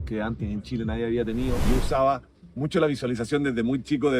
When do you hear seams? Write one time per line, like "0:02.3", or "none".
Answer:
0:01.6